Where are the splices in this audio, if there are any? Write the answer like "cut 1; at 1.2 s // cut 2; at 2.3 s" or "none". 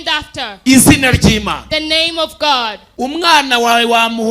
cut 1; at 2.8 s